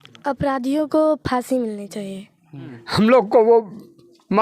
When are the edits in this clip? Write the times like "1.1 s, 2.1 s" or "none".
2.6 s